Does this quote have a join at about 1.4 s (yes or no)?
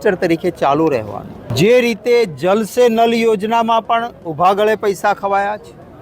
yes